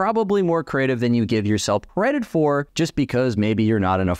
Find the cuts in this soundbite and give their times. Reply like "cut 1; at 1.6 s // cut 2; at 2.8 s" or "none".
cut 1; at 1.9 s // cut 2; at 2.7 s